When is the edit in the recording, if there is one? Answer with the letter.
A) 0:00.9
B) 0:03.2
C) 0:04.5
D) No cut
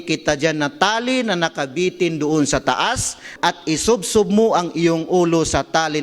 B